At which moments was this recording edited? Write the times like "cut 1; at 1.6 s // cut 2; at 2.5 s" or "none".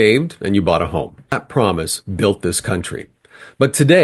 cut 1; at 1.4 s